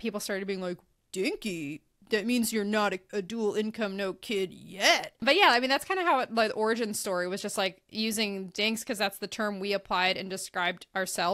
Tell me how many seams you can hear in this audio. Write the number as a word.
one